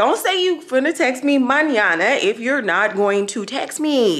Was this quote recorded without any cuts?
yes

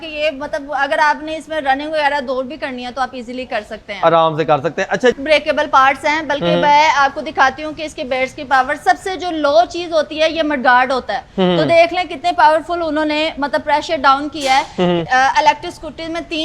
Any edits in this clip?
yes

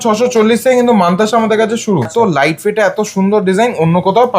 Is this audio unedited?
no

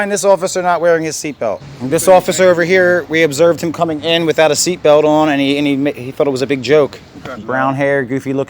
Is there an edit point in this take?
yes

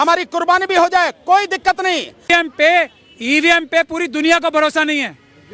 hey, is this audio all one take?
no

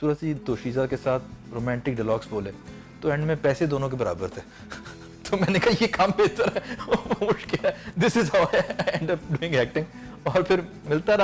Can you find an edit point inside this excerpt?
no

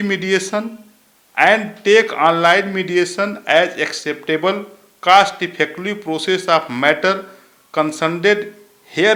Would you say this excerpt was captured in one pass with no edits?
yes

